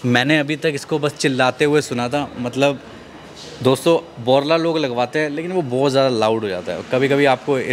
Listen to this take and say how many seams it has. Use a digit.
0